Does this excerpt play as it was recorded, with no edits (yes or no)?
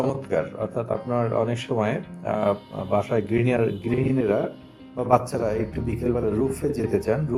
yes